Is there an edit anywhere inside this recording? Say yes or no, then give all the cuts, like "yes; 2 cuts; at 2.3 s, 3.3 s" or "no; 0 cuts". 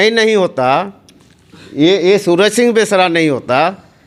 no; 0 cuts